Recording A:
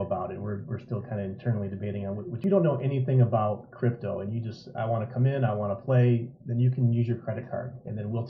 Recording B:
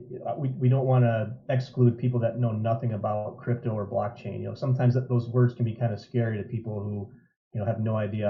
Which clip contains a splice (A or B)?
A